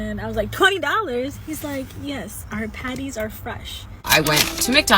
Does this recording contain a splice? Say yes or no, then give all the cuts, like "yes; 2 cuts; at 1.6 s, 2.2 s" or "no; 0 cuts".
yes; 1 cut; at 3.9 s